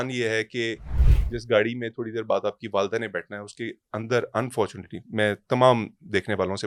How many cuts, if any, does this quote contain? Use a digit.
0